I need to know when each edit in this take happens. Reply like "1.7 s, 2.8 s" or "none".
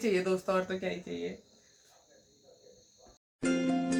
none